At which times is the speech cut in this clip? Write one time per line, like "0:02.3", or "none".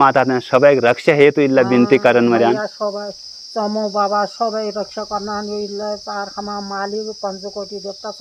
none